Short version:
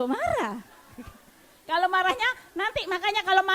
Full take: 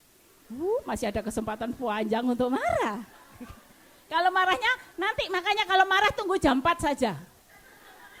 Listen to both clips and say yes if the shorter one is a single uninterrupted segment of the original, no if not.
yes